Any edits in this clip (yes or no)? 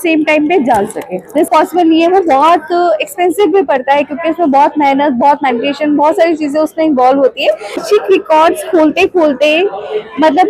yes